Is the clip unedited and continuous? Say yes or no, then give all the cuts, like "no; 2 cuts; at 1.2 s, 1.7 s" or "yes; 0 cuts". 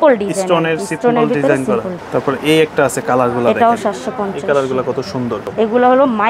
no; 2 cuts; at 2.0 s, 5.5 s